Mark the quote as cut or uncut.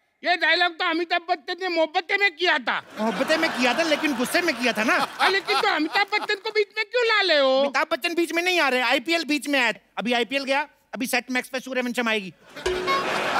uncut